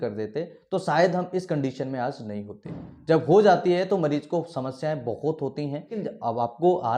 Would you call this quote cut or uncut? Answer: cut